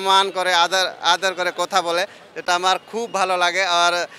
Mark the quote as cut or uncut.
uncut